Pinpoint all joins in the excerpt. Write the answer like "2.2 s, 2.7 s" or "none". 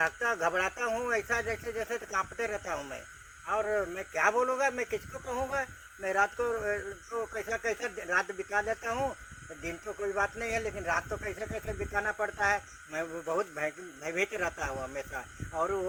none